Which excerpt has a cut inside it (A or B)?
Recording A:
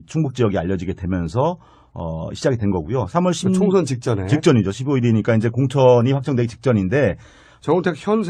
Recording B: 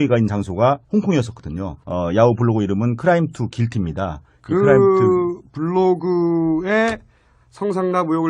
B